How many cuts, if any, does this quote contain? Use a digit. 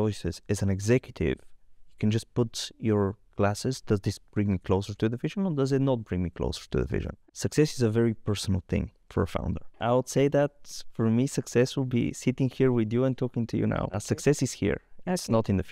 3